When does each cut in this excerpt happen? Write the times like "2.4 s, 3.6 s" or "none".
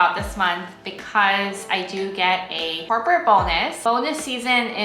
3.8 s